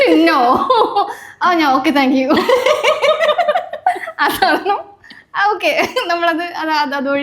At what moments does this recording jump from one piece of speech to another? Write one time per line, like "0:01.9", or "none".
none